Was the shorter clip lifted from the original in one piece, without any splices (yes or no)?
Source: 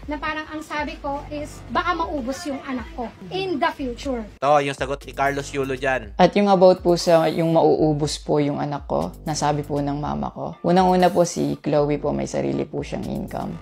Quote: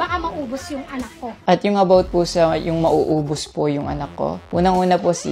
no